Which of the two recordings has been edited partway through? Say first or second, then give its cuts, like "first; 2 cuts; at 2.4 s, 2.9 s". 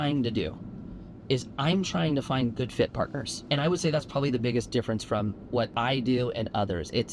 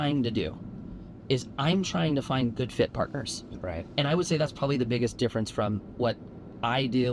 first; 2 cuts; at 3.4 s, 5.7 s